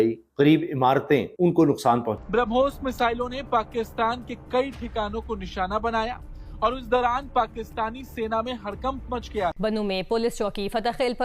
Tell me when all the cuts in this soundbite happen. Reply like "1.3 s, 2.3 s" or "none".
2.2 s, 9.6 s